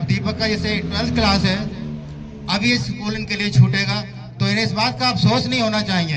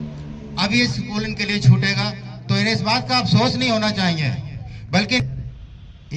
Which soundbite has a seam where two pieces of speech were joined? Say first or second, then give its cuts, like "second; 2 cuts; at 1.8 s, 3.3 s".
second; 1 cut; at 5.2 s